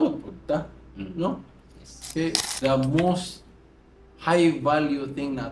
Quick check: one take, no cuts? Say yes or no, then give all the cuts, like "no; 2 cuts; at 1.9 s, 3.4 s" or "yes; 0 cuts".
no; 1 cut; at 2.4 s